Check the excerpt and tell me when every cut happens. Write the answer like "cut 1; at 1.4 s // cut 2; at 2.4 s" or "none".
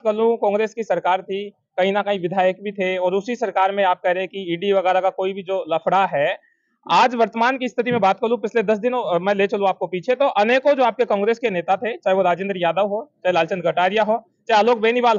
none

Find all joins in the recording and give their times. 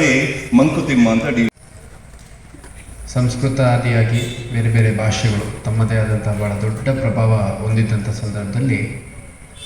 cut 1; at 1.5 s

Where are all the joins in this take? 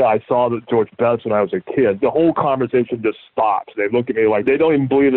cut 1; at 2.0 s // cut 2; at 4.4 s

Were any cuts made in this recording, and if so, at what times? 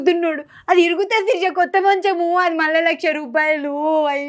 none

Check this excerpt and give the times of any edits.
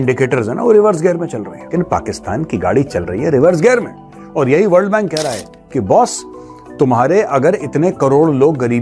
cut 1; at 1.5 s

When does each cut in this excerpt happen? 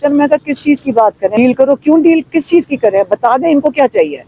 cut 1; at 1.3 s

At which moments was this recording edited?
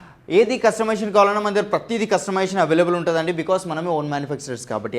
none

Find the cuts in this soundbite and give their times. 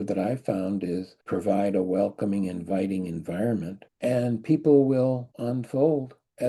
cut 1; at 3.8 s

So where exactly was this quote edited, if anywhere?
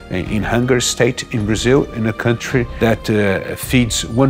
cut 1; at 2.7 s

